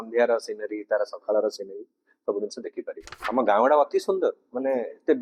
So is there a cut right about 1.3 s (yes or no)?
no